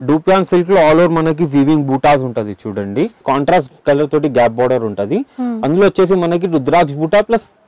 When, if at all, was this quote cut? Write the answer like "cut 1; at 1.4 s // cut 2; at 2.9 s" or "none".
cut 1; at 3.2 s